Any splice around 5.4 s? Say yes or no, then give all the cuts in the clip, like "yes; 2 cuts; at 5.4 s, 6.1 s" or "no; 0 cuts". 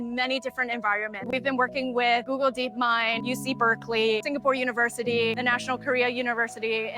yes; 3 cuts; at 1.3 s, 3.2 s, 5.4 s